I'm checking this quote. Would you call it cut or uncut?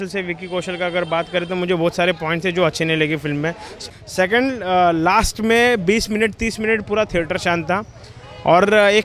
cut